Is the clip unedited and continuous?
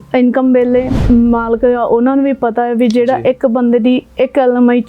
no; 1 cut; at 1.0 s

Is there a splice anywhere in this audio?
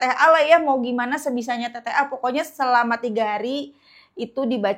no; 0 cuts

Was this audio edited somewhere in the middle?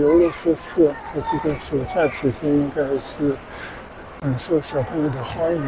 no; 0 cuts

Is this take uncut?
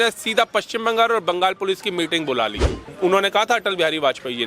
no; 1 cut; at 2.8 s

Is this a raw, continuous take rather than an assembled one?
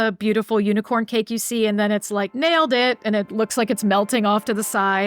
no; 1 cut; at 3.3 s

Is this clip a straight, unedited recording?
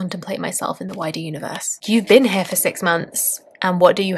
no; 1 cut; at 1.8 s

